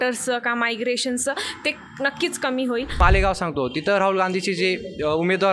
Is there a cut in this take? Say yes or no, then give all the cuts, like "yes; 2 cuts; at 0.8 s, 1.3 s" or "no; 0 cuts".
yes; 1 cut; at 3.0 s